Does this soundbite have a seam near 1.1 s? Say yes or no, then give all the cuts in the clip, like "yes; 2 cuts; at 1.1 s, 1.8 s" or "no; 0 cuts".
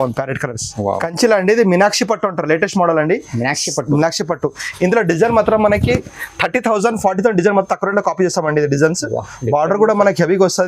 yes; 1 cut; at 1.1 s